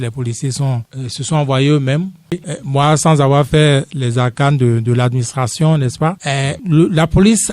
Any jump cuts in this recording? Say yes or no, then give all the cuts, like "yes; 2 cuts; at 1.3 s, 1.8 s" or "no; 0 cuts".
yes; 1 cut; at 2.4 s